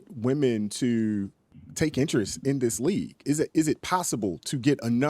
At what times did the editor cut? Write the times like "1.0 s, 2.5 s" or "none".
3.2 s